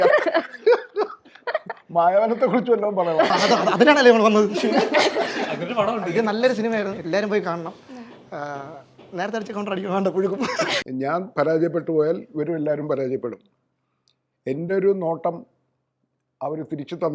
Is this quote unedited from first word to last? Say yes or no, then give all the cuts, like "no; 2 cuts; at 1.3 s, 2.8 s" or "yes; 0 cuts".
no; 1 cut; at 10.8 s